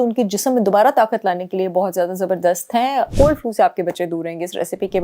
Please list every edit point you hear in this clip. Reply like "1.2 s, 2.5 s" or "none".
3.1 s